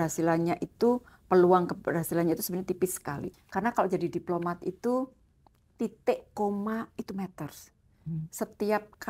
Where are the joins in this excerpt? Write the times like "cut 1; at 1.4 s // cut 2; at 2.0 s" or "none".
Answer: cut 1; at 3.3 s